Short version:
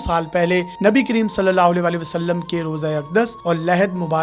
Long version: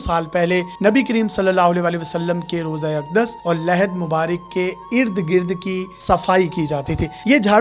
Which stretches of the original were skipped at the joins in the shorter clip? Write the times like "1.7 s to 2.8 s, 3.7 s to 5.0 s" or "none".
none